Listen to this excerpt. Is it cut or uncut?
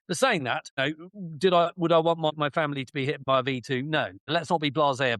cut